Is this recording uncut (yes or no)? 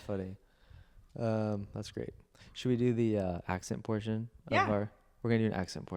yes